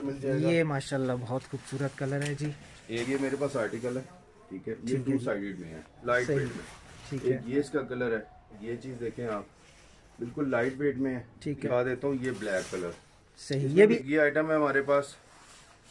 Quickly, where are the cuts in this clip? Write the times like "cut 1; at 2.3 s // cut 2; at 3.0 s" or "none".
cut 1; at 3.1 s // cut 2; at 5.9 s // cut 3; at 8.7 s // cut 4; at 11.7 s // cut 5; at 14.0 s